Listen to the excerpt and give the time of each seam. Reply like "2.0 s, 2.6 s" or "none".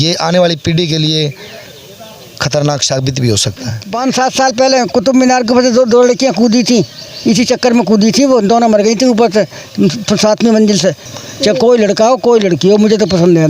3.9 s, 11.1 s